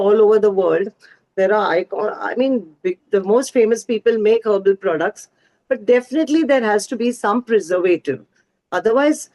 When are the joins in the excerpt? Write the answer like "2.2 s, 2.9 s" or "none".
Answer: none